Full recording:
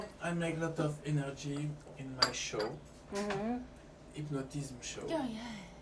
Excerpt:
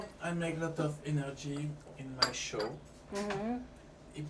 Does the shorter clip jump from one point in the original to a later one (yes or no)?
no